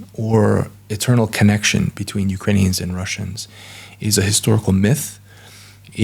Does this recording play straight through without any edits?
yes; 0 cuts

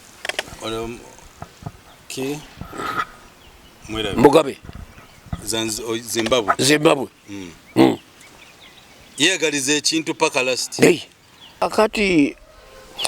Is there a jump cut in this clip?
yes; 1 cut; at 11.7 s

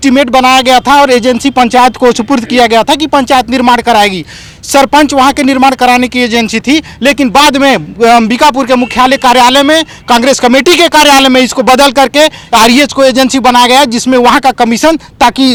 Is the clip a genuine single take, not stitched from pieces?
yes; 0 cuts

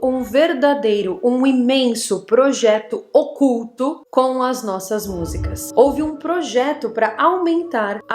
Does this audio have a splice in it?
yes; 1 cut; at 5.6 s

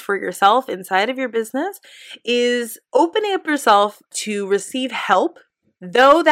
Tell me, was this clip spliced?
yes; 1 cut; at 2.7 s

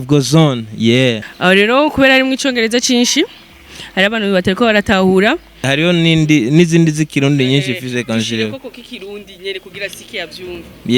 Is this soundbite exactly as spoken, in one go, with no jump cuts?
no; 2 cuts; at 1.3 s, 5.7 s

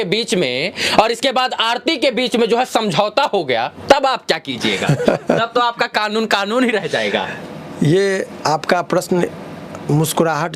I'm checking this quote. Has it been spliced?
no; 0 cuts

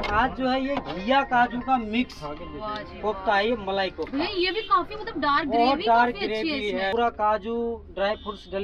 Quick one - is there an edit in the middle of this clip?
yes; 1 cut; at 6.9 s

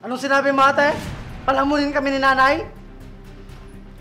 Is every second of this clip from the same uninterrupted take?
yes; 0 cuts

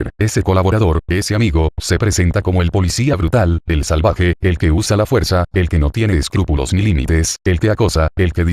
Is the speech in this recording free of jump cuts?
no; 1 cut; at 7.6 s

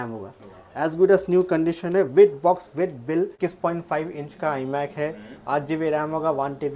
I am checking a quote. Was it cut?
yes; 1 cut; at 3.3 s

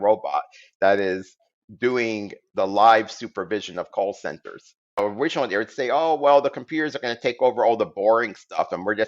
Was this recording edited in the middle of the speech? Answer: yes; 1 cut; at 5.0 s

